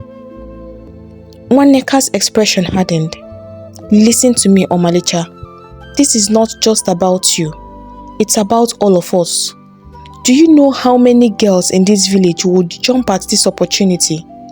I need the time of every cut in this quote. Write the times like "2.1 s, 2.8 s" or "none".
0.9 s